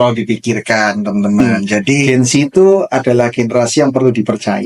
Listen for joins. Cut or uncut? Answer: cut